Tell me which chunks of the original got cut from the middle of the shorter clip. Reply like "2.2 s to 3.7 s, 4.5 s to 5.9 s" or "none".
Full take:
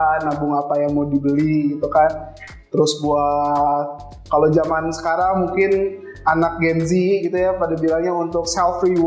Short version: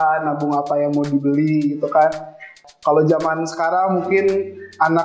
2.5 s to 4.0 s